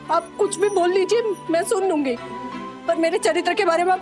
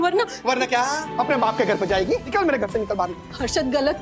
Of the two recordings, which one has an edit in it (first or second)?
second